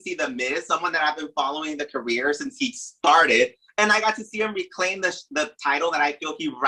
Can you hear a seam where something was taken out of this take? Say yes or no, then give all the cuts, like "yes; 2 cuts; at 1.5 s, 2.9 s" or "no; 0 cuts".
no; 0 cuts